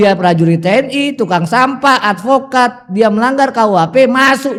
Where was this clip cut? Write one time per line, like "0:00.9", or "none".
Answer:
none